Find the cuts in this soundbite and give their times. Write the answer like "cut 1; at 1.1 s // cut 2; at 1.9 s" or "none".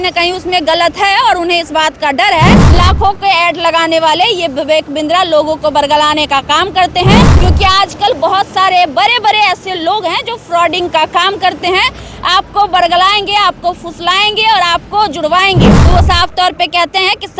cut 1; at 2.6 s // cut 2; at 7.3 s // cut 3; at 15.8 s